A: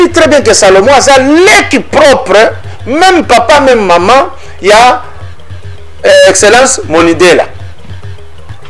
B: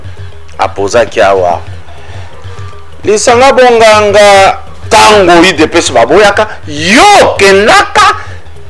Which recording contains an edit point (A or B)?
B